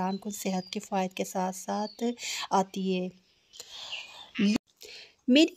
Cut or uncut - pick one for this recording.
cut